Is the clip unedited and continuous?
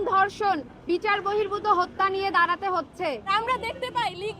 no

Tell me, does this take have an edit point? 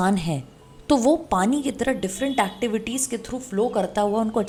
no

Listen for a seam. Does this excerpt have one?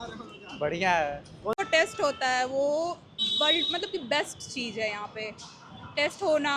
yes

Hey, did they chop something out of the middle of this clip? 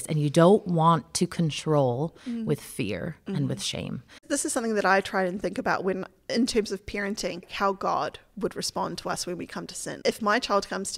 yes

